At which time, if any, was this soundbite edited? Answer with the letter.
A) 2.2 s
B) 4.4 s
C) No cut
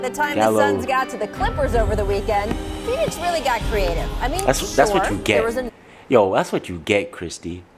B